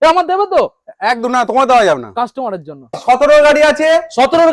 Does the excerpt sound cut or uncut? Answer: cut